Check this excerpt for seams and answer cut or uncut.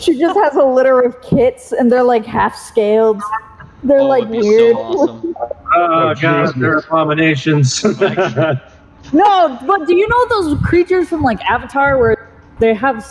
uncut